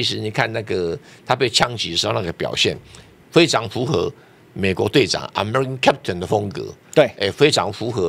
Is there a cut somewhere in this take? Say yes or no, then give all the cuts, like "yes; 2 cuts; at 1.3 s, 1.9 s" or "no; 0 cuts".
no; 0 cuts